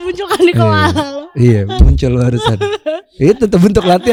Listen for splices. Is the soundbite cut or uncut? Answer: uncut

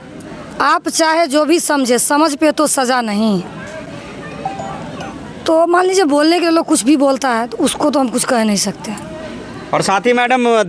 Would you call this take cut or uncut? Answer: uncut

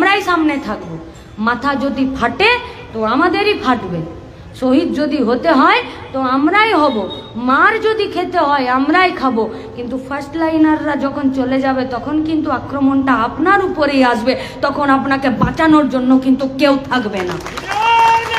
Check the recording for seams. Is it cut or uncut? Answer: uncut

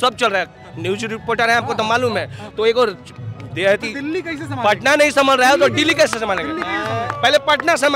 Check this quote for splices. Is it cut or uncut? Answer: uncut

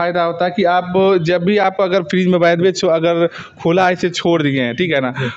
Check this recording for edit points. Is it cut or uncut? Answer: uncut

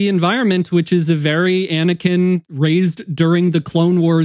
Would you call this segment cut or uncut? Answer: cut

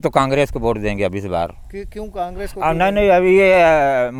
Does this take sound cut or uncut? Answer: uncut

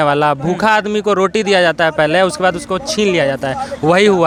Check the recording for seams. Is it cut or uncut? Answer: uncut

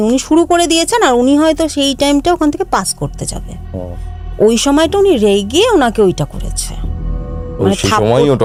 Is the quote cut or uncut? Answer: uncut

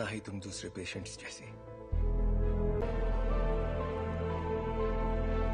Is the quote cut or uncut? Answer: cut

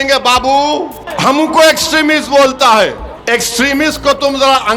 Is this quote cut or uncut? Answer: cut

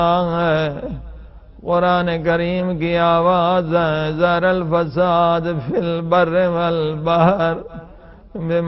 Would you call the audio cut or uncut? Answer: cut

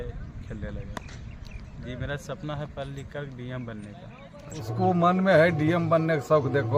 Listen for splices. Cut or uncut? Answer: cut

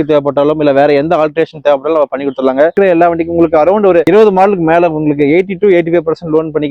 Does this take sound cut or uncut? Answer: cut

